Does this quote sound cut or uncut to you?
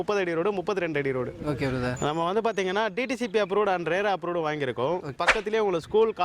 cut